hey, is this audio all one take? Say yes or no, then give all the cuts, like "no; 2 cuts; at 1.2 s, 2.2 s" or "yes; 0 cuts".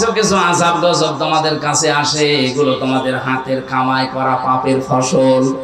yes; 0 cuts